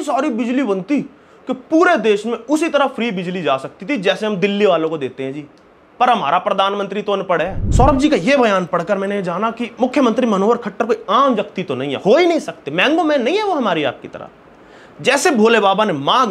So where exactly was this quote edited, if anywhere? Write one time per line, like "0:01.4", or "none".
0:07.6